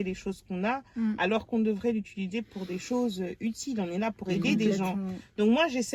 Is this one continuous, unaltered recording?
yes; 0 cuts

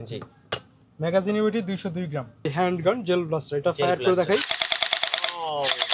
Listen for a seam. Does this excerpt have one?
yes; 1 cut; at 2.5 s

